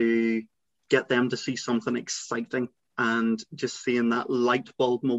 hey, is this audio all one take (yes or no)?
no